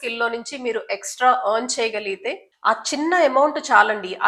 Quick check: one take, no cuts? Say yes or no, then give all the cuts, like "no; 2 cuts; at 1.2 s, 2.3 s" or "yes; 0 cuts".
yes; 0 cuts